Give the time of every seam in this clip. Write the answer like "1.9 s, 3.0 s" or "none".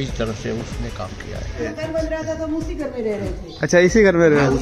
1.6 s